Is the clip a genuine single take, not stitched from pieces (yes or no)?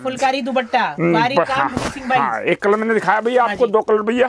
yes